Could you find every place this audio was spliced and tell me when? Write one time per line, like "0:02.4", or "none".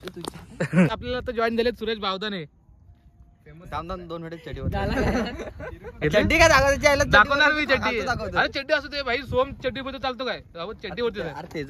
0:00.9